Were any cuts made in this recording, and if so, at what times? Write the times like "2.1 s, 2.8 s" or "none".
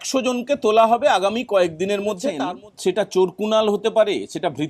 2.4 s

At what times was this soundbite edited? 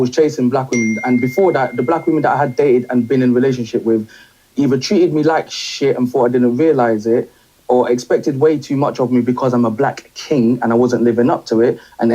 1.4 s, 6.7 s, 10.1 s

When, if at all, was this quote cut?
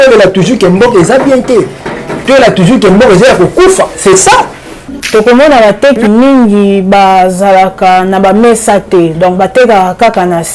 5.0 s

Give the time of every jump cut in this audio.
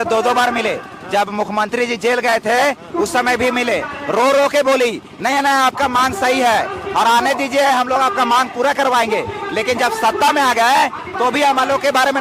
none

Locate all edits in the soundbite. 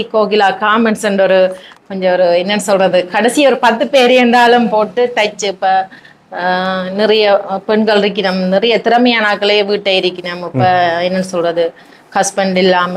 none

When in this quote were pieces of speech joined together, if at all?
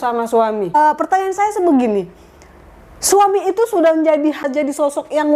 0.7 s, 4.5 s

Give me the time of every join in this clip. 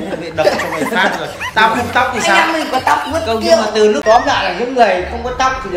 4.0 s

